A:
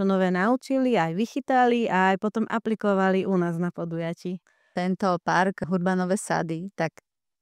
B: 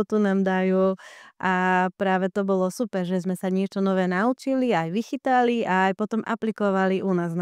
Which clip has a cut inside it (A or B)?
A